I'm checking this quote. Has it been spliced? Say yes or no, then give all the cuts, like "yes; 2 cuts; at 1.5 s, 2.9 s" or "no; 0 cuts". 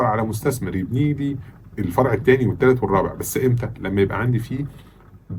no; 0 cuts